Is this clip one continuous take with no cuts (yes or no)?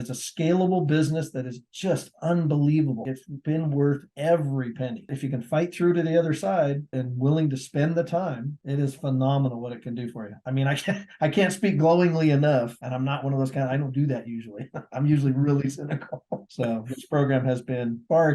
no